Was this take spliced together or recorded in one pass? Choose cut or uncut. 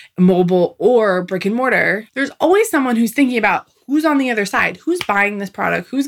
cut